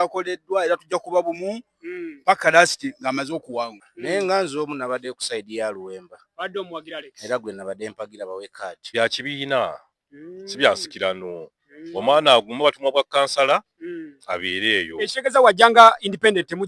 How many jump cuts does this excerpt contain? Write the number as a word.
two